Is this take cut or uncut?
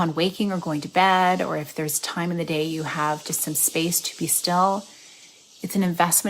uncut